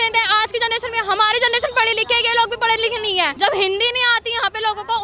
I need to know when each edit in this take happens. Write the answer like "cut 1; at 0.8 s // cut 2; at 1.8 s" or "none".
cut 1; at 3.3 s

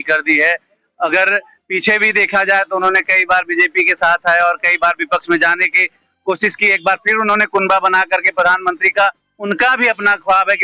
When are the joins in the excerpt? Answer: none

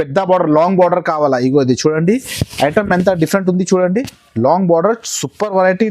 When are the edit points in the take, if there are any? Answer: none

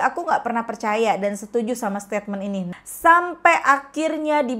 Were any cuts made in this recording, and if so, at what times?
cut 1; at 2.7 s

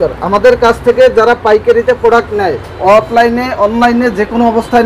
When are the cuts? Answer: none

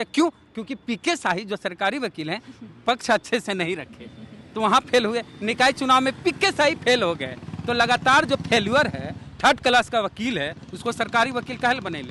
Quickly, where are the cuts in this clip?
none

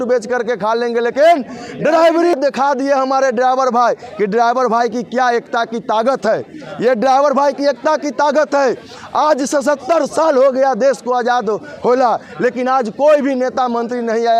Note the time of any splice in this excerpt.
cut 1; at 2.4 s

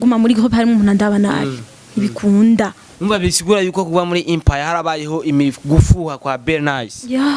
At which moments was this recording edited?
cut 1; at 2.8 s

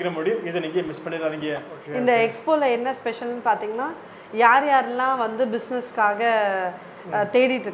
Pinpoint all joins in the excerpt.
cut 1; at 1.7 s

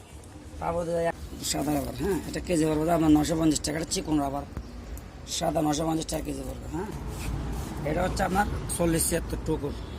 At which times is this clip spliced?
cut 1; at 1.1 s // cut 2; at 7.0 s

